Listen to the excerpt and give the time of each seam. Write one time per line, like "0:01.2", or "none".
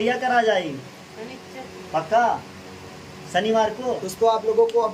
none